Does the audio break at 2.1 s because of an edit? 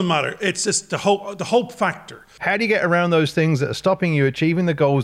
yes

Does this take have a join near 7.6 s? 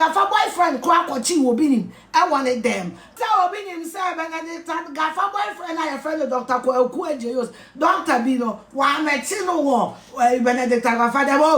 no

